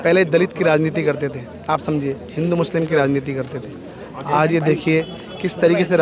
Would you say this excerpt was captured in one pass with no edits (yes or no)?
yes